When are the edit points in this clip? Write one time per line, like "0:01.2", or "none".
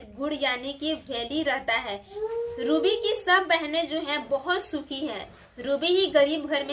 0:02.1